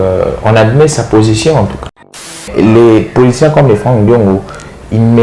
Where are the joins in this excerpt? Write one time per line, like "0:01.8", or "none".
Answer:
0:02.0

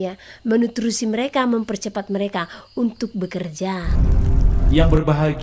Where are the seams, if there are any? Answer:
0:03.9

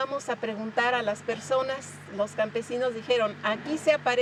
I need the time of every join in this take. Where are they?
none

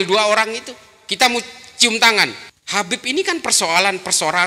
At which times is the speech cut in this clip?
0:02.5

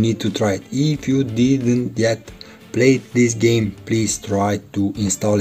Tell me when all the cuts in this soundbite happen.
none

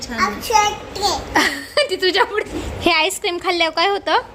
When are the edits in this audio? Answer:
0:02.5

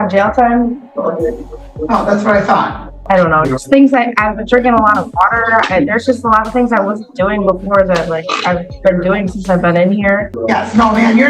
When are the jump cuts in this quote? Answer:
0:03.0
0:10.3

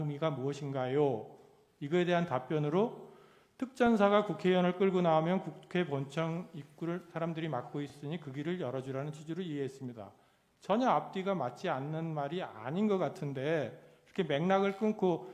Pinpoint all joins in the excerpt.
none

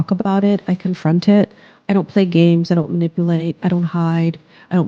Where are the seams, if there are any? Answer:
none

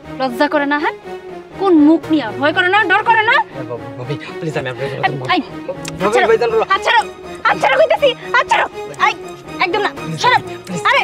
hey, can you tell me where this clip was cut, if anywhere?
none

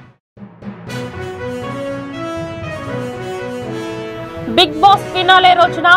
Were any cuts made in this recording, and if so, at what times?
0:04.0

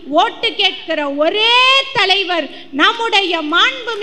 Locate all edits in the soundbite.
none

